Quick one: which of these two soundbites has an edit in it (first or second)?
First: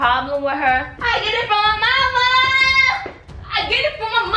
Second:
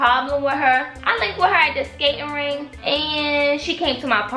first